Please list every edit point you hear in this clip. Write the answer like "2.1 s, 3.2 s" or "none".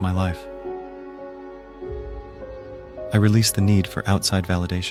none